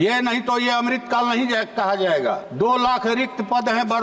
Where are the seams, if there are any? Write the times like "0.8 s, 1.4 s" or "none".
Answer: 2.5 s